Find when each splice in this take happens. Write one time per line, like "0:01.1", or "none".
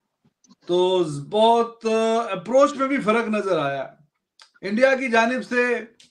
0:04.0